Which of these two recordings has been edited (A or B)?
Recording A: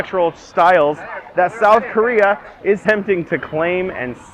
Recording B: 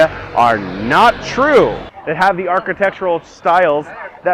B